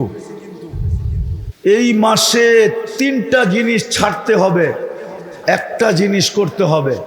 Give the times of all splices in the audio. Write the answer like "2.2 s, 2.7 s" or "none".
1.5 s